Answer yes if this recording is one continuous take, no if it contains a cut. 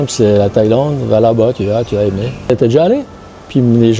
no